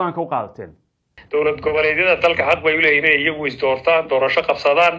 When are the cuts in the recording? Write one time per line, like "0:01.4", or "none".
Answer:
0:01.1